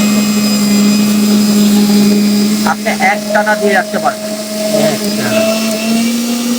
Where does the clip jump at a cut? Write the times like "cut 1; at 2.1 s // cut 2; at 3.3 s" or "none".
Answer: none